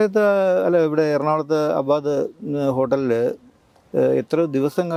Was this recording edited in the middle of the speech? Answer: no; 0 cuts

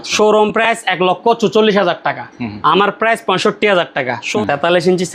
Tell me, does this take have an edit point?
yes; 1 cut; at 4.2 s

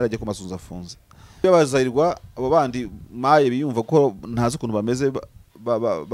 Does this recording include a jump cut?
yes; 1 cut; at 1.4 s

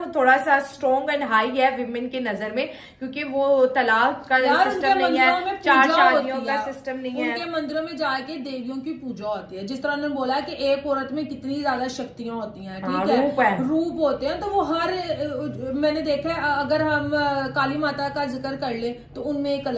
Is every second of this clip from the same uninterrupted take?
yes; 0 cuts

